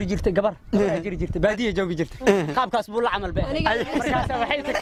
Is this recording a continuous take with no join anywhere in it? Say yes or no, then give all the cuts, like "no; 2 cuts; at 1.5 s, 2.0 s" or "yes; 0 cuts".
yes; 0 cuts